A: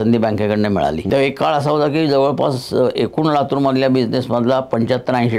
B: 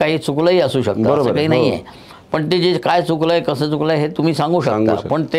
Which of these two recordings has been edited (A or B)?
A